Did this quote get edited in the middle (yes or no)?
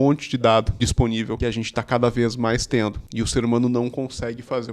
yes